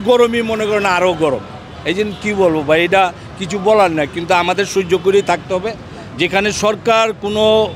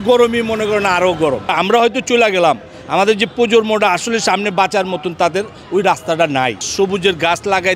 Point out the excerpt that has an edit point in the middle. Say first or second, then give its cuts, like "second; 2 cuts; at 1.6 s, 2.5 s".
second; 2 cuts; at 1.5 s, 6.7 s